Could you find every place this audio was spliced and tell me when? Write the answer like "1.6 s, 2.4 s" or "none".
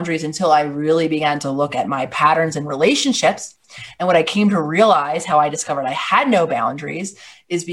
none